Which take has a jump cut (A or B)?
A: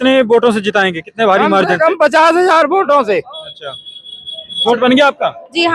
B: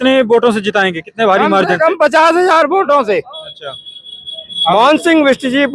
A